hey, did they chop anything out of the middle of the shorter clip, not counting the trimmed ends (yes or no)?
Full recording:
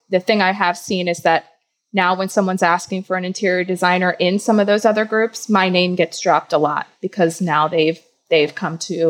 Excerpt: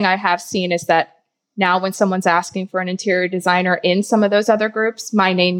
no